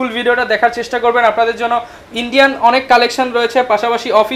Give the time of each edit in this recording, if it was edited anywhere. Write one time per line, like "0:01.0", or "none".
none